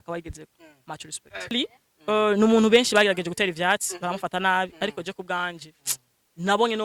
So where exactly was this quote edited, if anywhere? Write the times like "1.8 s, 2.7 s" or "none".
1.5 s